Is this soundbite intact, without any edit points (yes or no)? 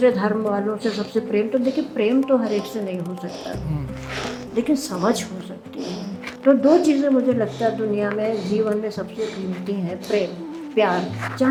yes